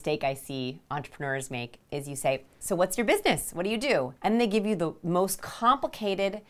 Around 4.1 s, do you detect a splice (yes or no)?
yes